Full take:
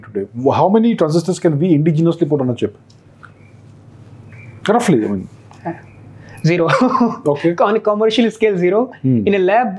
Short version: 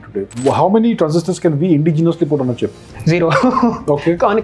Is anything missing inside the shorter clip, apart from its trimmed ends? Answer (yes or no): yes